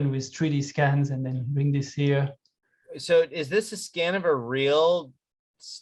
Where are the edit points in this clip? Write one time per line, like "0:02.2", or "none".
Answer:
none